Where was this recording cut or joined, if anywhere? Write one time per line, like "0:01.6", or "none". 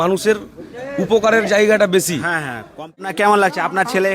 0:03.1